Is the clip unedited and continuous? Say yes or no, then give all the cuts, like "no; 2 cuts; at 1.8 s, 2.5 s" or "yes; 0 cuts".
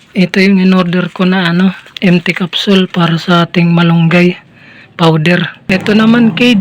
no; 1 cut; at 5.7 s